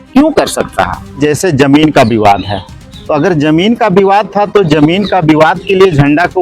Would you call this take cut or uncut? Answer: cut